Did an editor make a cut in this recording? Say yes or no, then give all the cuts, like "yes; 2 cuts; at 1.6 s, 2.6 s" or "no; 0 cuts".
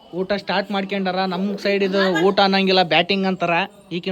no; 0 cuts